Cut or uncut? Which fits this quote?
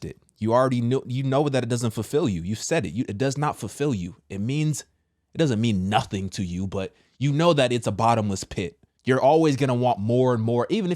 cut